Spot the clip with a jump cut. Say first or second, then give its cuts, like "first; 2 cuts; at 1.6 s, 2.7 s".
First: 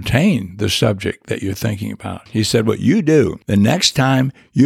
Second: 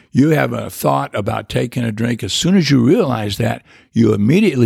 first; 2 cuts; at 2.3 s, 3.4 s